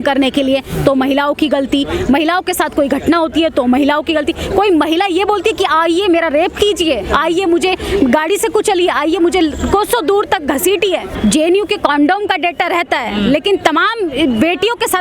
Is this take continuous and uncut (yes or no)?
no